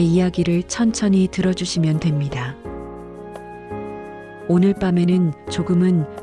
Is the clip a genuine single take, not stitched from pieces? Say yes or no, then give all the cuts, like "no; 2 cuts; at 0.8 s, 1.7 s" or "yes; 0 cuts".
yes; 0 cuts